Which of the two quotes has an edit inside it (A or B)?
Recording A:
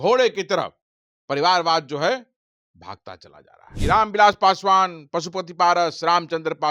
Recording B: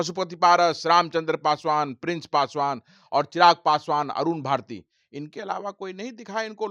A